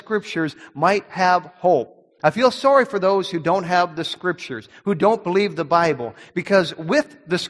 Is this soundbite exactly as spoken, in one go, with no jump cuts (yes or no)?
yes